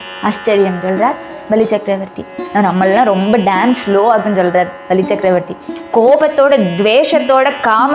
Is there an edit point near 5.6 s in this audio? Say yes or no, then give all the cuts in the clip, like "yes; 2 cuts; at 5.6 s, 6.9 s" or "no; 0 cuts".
no; 1 cut; at 2.4 s